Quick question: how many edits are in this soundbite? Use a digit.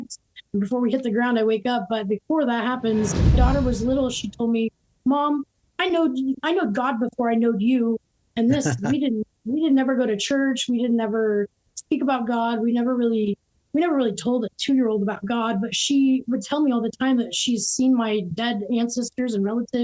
1